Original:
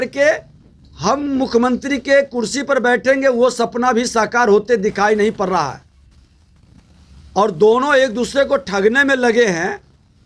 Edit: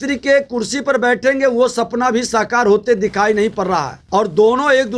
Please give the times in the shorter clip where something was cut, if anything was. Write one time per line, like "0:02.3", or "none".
0:04.0